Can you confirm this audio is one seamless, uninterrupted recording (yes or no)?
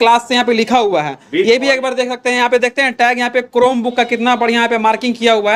yes